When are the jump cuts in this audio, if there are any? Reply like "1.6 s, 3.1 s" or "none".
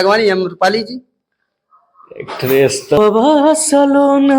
3.0 s